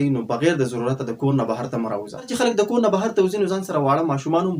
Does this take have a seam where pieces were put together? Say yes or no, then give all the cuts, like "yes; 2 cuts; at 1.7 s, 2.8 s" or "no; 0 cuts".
yes; 1 cut; at 2.1 s